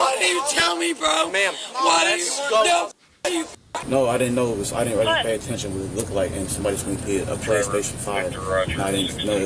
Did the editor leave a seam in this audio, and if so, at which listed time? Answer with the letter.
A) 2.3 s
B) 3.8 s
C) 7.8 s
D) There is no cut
B